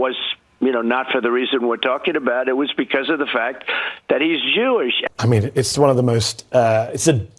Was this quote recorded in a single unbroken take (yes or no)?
no